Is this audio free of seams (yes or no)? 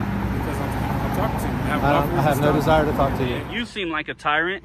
no